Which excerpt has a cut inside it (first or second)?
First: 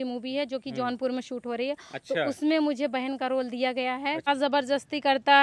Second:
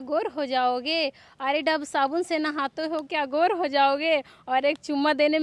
first